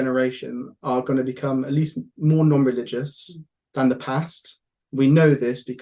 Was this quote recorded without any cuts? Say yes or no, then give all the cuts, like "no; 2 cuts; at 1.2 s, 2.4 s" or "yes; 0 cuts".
yes; 0 cuts